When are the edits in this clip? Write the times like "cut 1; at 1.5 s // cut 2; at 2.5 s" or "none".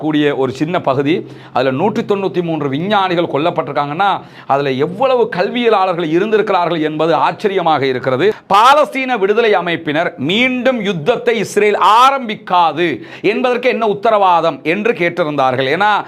cut 1; at 8.4 s